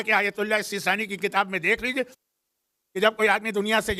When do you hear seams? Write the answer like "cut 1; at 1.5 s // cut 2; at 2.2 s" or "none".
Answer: none